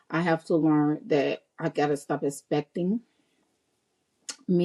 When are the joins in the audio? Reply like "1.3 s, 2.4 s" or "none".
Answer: none